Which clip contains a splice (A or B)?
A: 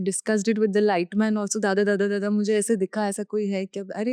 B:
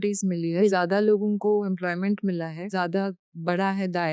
B